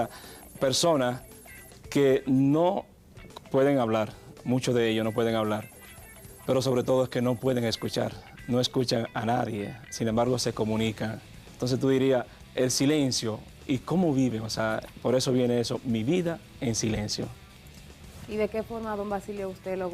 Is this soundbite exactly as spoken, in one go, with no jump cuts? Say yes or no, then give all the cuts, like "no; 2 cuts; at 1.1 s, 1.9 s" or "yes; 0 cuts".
no; 1 cut; at 12.8 s